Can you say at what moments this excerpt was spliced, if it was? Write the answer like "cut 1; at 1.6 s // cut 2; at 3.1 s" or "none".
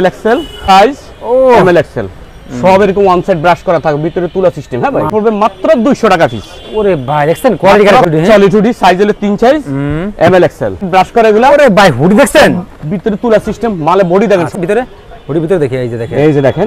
cut 1; at 0.7 s // cut 2; at 5.1 s // cut 3; at 8.0 s // cut 4; at 10.8 s // cut 5; at 14.5 s